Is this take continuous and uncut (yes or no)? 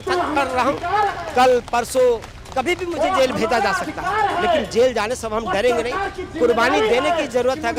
yes